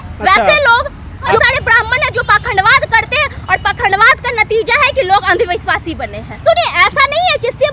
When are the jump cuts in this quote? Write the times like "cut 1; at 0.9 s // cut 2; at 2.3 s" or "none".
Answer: cut 1; at 1.4 s // cut 2; at 6.4 s